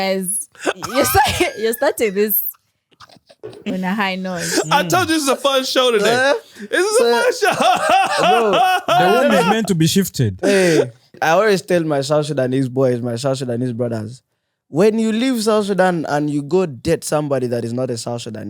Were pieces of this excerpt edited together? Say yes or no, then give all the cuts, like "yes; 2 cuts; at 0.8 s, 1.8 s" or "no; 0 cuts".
yes; 1 cut; at 11.2 s